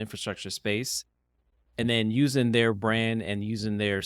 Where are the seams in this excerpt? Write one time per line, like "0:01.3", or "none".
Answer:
none